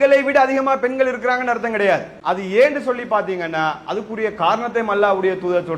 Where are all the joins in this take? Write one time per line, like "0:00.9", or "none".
0:02.1